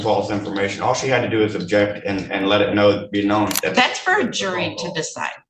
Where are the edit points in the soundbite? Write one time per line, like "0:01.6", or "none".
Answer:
0:03.6